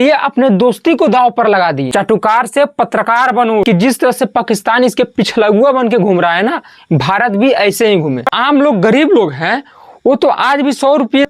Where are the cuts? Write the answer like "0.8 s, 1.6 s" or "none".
1.8 s, 3.6 s, 8.3 s